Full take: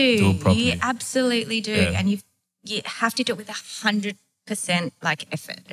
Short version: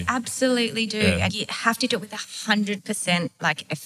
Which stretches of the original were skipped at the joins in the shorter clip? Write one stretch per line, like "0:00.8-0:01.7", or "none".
0:02.0-0:02.6
0:04.2-0:04.4